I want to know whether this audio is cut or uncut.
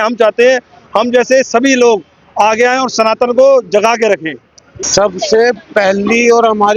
cut